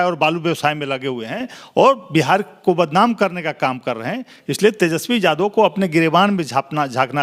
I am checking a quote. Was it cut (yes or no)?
no